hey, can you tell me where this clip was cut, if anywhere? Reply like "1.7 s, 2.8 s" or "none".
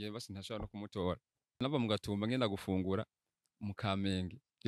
1.6 s